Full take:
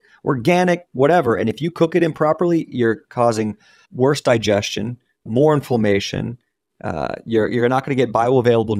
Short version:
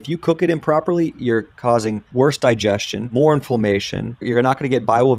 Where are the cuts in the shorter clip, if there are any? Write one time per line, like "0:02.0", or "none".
0:02.0
0:03.0
0:04.2